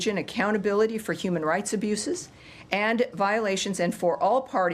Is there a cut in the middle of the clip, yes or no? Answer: yes